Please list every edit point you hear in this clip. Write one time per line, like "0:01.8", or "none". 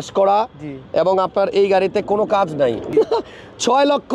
0:02.9